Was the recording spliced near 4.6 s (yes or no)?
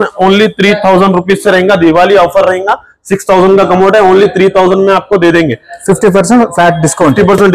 no